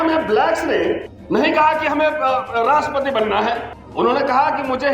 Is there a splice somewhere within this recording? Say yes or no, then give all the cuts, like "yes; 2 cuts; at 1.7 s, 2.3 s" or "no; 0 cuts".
no; 0 cuts